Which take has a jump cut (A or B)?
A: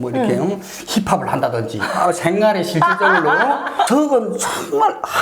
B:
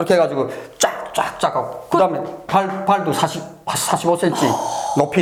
A